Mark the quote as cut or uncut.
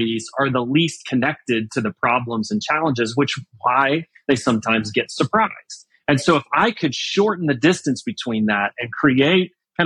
uncut